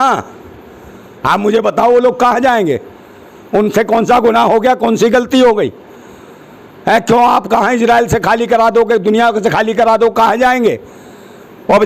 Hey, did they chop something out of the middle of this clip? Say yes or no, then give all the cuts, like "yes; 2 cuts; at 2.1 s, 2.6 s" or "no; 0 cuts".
no; 0 cuts